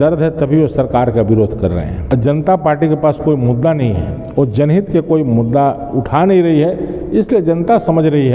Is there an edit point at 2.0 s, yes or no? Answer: yes